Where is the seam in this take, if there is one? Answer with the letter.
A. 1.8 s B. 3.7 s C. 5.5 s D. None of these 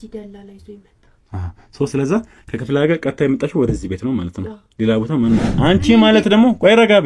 C